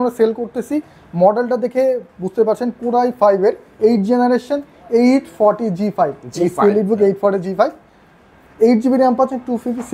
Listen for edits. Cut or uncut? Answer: uncut